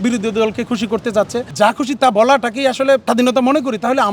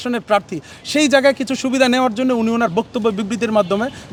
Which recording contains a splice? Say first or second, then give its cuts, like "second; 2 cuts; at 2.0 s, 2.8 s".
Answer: first; 2 cuts; at 1.4 s, 3.0 s